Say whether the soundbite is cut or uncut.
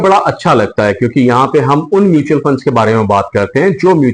uncut